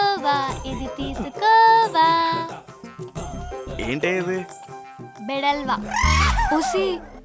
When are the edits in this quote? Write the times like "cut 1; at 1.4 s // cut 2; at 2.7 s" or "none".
none